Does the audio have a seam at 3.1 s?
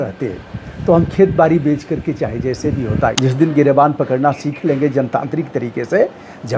yes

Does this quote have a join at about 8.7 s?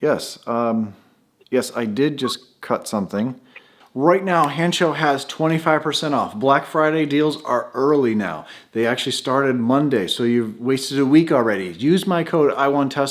no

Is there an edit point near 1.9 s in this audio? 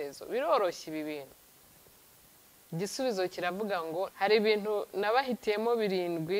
no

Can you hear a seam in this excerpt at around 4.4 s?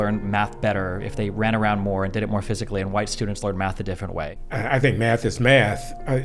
yes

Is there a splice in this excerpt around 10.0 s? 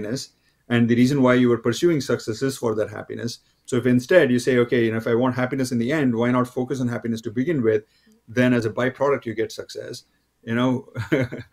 no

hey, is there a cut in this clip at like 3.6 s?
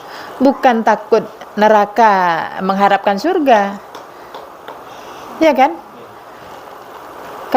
no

